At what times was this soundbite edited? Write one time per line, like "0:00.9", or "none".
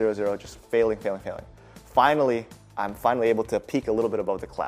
none